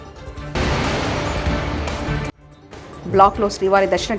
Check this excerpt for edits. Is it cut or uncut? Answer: uncut